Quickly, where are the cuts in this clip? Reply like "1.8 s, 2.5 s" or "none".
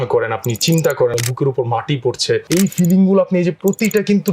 1.1 s, 2.4 s

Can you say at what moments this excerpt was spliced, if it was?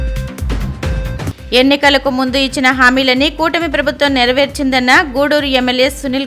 1.3 s

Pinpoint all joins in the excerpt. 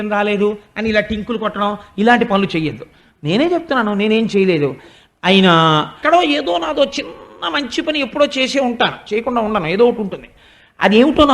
6.0 s

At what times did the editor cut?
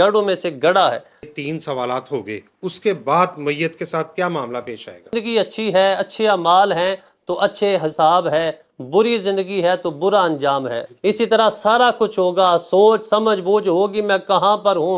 1.4 s, 5.1 s, 10.9 s

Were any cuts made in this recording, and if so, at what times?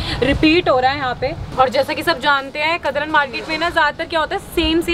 1.4 s

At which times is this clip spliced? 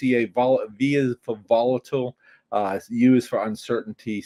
none

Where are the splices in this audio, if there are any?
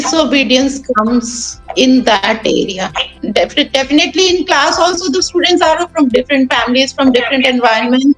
3.1 s

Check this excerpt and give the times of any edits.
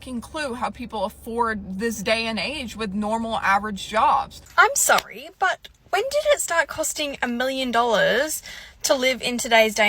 4.4 s

